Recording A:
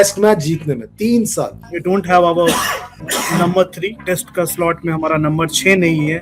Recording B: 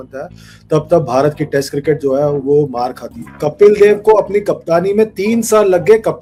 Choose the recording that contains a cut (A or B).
A